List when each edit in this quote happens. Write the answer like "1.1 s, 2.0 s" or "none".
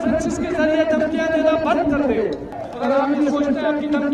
2.6 s

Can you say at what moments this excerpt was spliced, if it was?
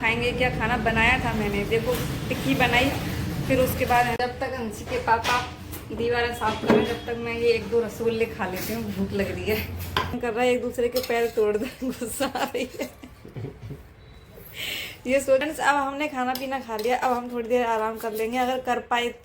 4.2 s, 10.2 s, 15.4 s

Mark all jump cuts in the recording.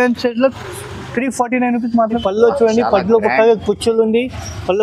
2.2 s

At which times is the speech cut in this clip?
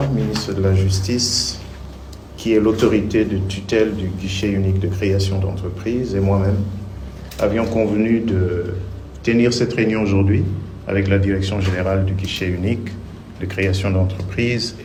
none

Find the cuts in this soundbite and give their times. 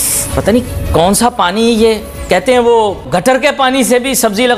3.0 s

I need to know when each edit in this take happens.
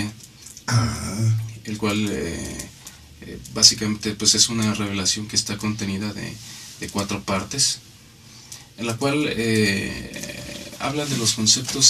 none

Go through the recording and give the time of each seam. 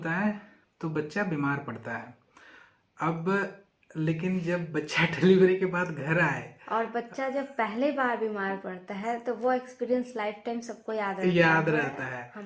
none

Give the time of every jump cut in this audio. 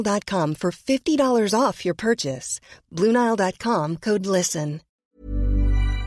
5.0 s

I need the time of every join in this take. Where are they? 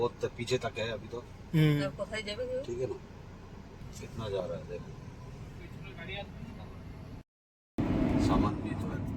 3.8 s

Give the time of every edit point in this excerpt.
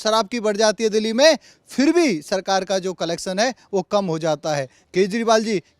4.8 s

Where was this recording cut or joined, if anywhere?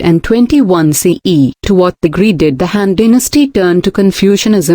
1.6 s

